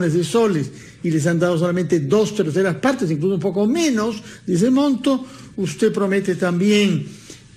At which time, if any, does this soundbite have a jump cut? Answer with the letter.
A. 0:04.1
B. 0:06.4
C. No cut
A